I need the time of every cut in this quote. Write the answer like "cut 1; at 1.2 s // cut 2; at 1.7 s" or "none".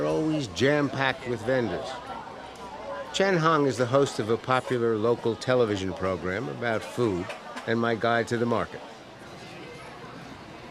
none